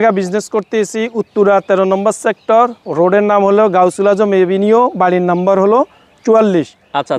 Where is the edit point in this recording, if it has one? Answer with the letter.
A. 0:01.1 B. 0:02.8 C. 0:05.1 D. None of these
D